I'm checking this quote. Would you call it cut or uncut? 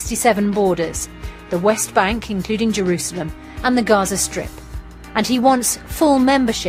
uncut